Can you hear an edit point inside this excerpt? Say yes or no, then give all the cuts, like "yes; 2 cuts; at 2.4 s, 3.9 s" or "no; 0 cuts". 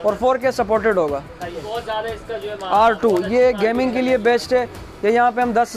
yes; 1 cut; at 1.7 s